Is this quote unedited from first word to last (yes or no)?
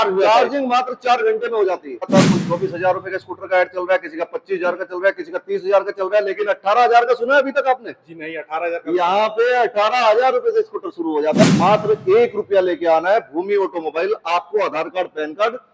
no